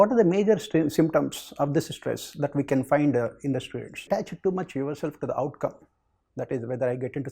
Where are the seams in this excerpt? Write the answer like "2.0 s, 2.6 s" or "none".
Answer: 4.0 s